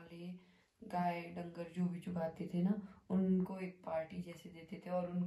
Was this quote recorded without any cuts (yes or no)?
yes